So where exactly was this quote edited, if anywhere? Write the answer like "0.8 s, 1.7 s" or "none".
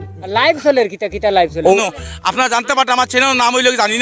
1.8 s

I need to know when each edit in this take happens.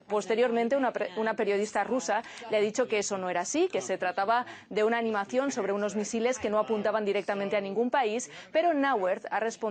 1.0 s

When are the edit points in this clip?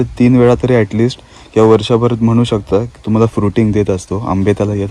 none

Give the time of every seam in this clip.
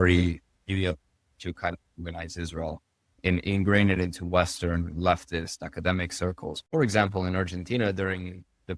6.5 s

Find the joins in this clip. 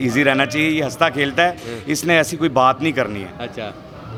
none

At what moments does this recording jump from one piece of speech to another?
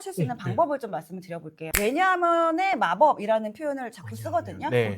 1.7 s

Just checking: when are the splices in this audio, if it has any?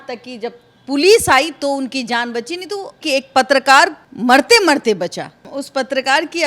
3.0 s, 4.0 s, 5.4 s

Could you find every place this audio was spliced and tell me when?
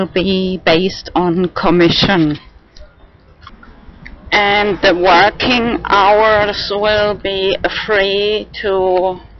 3.6 s

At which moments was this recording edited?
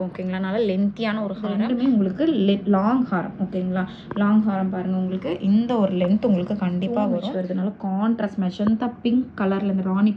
1.4 s, 7.2 s

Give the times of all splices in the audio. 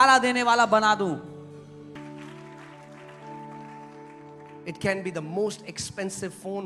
2.0 s

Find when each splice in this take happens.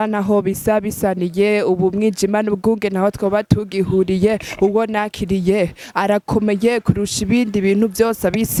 none

